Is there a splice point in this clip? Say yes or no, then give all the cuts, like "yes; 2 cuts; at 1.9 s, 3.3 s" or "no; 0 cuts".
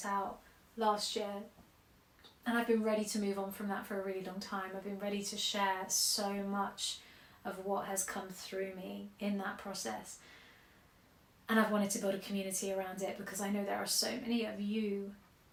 no; 0 cuts